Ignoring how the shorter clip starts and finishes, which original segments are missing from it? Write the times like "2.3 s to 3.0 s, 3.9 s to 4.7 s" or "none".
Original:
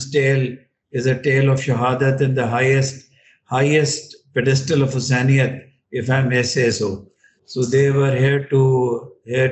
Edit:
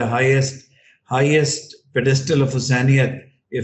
none